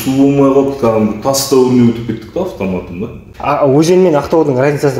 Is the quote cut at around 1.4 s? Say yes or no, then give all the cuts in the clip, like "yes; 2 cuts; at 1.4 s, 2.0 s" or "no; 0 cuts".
no; 1 cut; at 3.3 s